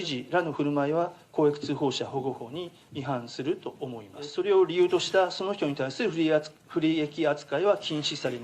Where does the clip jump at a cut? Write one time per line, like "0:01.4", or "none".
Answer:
0:04.3